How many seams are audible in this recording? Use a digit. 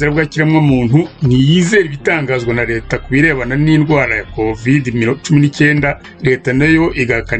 1